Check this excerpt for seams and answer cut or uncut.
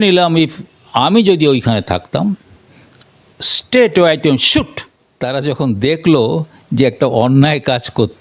cut